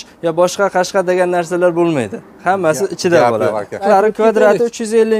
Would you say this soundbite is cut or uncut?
cut